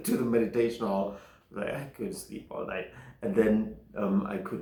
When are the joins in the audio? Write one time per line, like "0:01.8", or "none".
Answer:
none